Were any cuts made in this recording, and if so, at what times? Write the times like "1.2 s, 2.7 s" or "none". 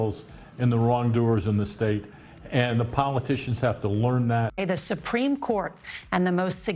4.5 s